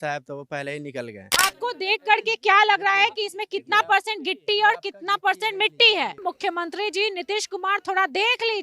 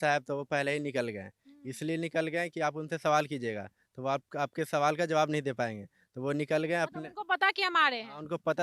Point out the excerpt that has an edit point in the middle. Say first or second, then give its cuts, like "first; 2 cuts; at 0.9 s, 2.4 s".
first; 2 cuts; at 1.2 s, 6.2 s